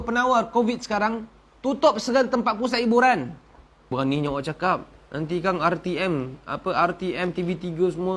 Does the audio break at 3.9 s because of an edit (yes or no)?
yes